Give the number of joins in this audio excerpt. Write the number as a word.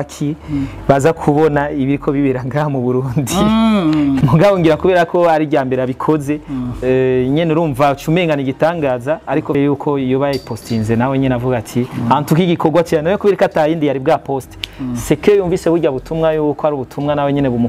two